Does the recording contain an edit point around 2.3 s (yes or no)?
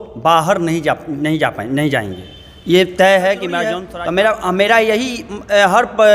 no